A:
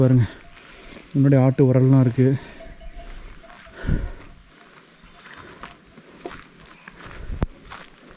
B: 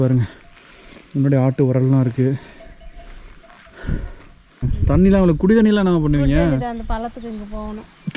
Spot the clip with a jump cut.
B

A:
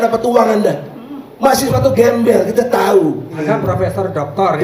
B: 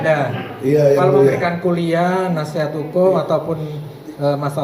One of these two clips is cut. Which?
A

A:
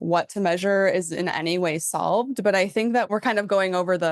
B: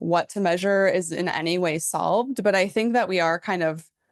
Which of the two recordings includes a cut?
A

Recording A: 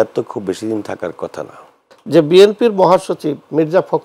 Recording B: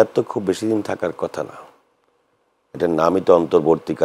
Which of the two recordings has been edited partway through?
A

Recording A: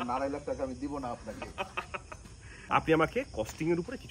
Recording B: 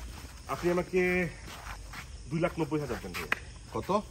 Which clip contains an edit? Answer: A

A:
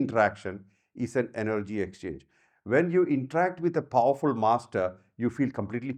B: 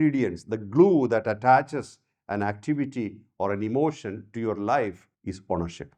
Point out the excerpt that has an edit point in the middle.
B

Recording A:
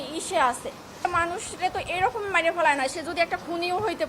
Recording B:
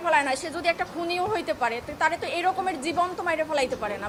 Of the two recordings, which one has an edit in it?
A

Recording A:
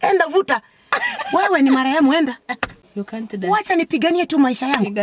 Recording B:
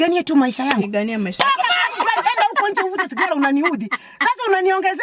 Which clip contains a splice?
A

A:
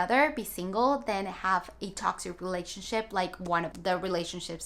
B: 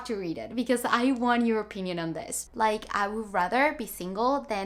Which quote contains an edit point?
B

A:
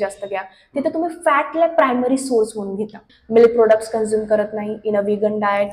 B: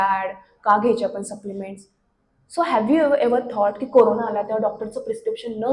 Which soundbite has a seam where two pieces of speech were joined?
A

